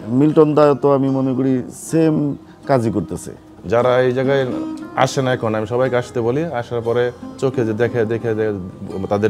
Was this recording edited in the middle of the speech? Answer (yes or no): yes